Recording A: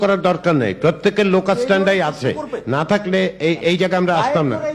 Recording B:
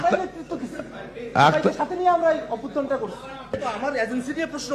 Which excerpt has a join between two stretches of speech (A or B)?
B